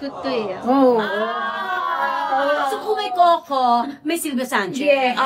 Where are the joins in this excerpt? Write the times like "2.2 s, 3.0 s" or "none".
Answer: none